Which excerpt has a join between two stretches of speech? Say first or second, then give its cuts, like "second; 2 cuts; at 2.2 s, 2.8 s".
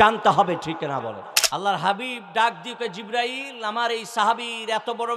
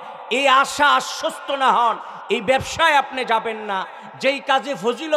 first; 1 cut; at 1.3 s